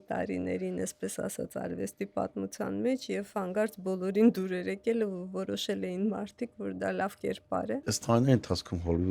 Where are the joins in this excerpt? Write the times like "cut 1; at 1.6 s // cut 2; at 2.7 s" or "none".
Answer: cut 1; at 7.8 s